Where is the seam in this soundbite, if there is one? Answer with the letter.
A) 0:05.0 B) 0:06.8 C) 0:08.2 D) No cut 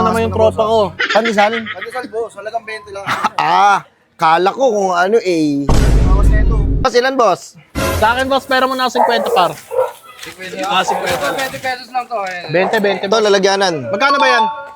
B